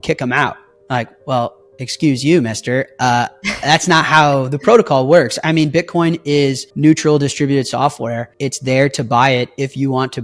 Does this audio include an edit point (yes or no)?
yes